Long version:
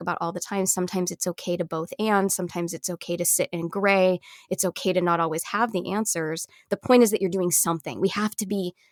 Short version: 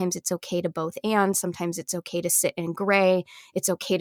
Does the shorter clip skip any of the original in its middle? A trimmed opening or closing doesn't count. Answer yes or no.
no